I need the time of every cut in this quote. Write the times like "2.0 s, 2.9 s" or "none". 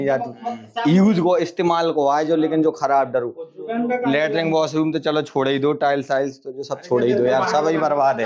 none

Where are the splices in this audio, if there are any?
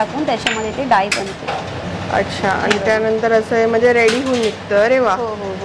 none

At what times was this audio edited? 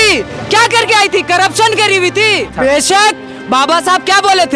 2.5 s

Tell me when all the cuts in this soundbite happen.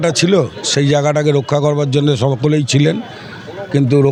none

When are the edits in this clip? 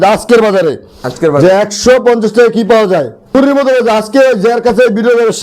3.3 s

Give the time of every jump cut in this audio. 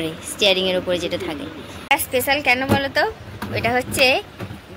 1.7 s

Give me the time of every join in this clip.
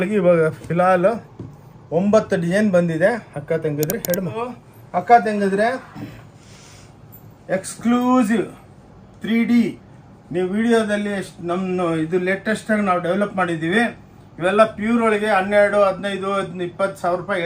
4.8 s

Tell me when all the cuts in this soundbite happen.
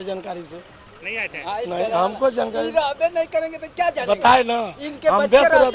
none

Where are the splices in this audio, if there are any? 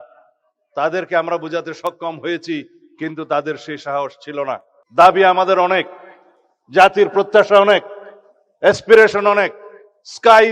4.7 s

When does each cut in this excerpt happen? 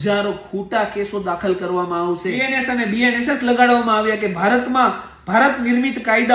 2.5 s

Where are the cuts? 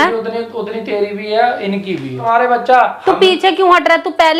2.2 s

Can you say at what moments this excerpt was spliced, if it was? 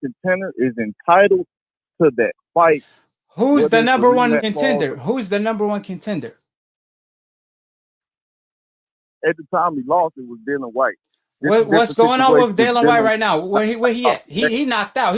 4.4 s

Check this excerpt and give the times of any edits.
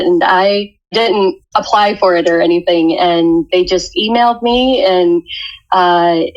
1.2 s, 3.5 s

